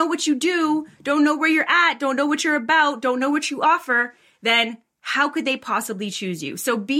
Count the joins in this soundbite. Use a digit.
0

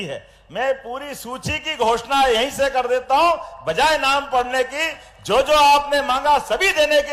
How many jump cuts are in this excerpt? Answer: 0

